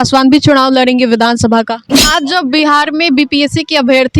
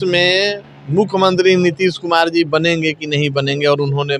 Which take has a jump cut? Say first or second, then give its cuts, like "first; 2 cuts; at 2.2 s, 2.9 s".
first; 1 cut; at 1.9 s